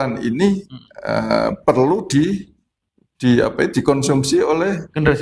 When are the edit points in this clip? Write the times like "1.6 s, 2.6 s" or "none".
none